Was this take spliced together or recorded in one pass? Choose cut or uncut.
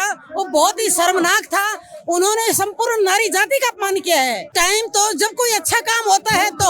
cut